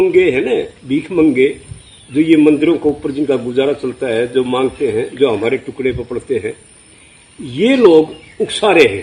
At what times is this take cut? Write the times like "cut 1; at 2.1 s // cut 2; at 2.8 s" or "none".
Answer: none